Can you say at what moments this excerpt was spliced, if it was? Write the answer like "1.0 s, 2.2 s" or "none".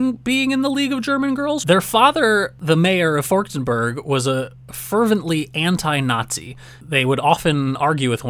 1.6 s, 2.5 s